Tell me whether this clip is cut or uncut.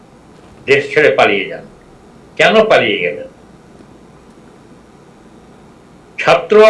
uncut